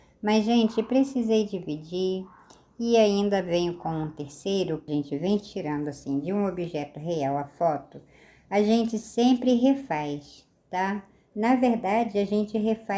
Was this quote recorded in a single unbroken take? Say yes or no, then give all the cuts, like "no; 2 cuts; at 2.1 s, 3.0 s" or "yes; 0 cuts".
no; 1 cut; at 4.9 s